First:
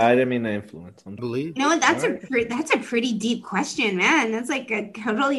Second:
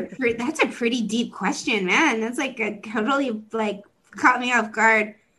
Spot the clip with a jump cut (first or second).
first